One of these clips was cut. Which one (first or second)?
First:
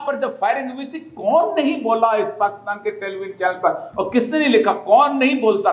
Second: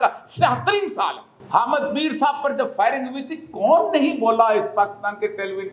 second